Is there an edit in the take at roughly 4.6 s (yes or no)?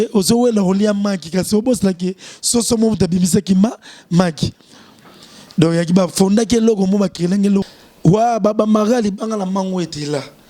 no